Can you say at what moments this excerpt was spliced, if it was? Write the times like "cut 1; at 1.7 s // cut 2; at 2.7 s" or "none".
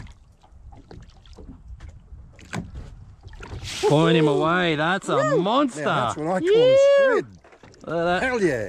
none